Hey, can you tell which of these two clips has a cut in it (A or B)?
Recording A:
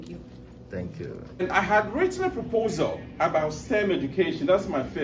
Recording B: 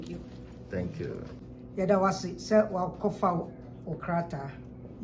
A